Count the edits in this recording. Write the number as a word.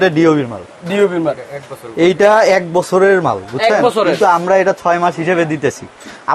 zero